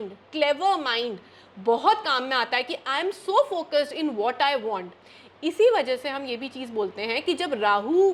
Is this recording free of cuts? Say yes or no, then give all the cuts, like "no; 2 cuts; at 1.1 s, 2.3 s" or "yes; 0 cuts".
yes; 0 cuts